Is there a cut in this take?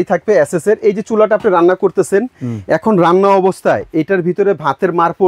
no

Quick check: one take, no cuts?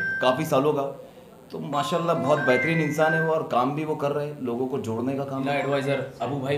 no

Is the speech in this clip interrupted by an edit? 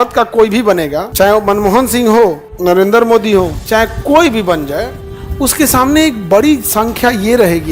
yes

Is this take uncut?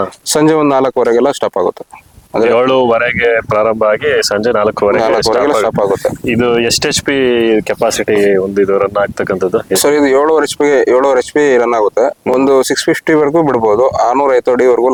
yes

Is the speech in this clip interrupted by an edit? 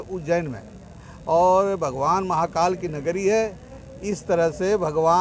no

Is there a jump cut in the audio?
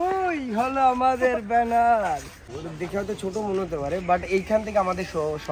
yes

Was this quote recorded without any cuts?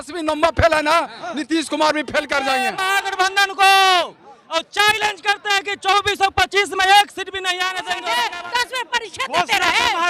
no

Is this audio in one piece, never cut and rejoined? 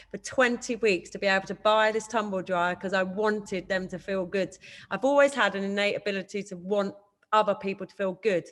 yes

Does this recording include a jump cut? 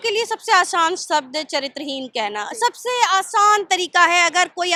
no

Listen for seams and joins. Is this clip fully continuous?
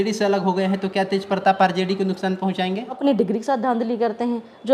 no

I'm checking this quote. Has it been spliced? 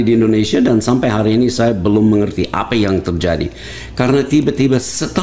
no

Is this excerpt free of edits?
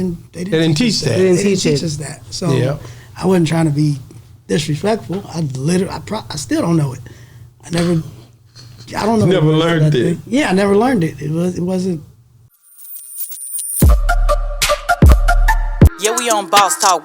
no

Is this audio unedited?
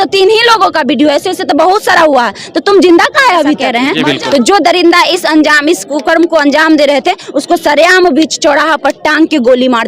no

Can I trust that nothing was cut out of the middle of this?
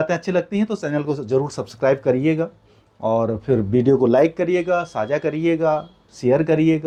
yes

